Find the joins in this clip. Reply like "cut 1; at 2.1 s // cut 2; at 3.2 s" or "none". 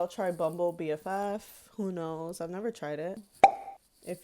cut 1; at 3.2 s